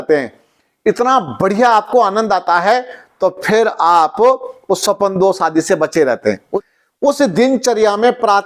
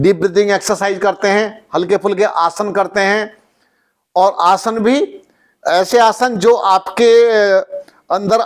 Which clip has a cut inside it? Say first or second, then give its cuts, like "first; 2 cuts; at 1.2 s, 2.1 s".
first; 1 cut; at 6.5 s